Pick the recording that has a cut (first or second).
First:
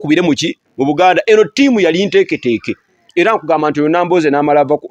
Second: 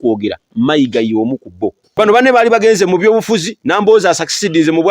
second